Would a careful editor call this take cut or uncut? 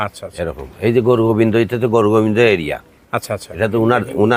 uncut